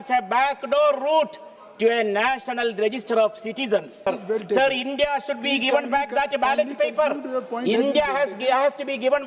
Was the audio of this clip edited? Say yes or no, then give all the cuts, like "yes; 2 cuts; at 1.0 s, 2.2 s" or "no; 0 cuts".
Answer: yes; 1 cut; at 4.2 s